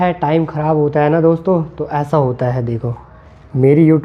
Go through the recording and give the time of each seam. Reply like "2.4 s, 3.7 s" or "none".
none